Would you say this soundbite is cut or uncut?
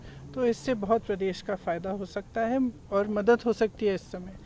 uncut